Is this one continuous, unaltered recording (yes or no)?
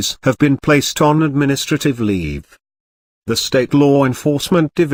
yes